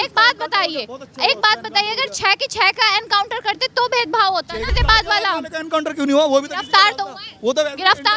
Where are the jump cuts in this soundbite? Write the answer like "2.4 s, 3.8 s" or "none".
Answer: 4.7 s